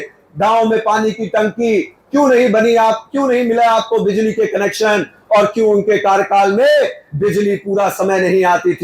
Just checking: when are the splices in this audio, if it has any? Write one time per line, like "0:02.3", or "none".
none